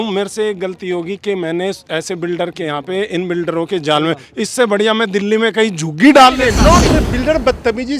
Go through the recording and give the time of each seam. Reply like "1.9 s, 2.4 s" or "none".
6.8 s

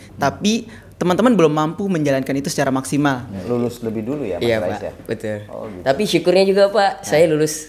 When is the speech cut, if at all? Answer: 3.4 s

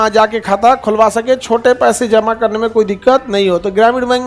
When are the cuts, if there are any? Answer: none

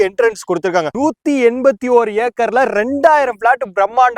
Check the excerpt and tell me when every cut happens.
0.9 s

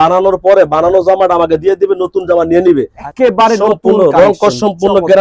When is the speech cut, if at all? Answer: 3.0 s

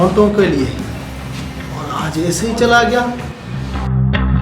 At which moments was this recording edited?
none

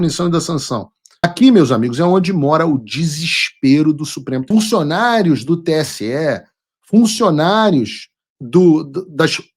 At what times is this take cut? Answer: 1.2 s, 4.4 s

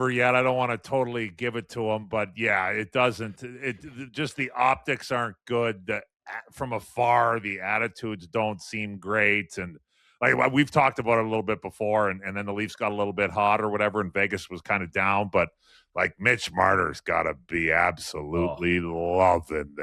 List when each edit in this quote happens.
none

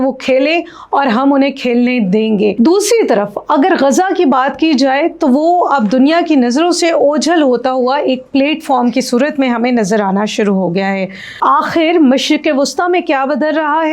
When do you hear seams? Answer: none

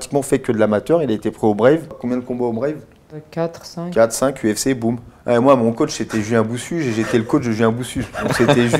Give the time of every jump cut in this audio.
2.0 s, 3.2 s, 5.1 s

